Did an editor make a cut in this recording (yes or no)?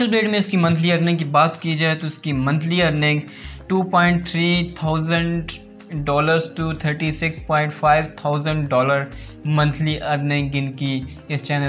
no